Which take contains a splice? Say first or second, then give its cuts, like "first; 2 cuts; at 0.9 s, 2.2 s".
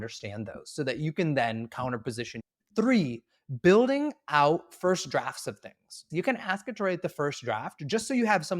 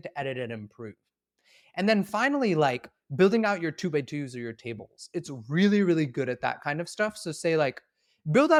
first; 2 cuts; at 2.3 s, 6.0 s